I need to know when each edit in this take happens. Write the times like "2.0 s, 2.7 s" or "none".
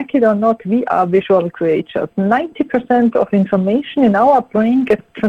none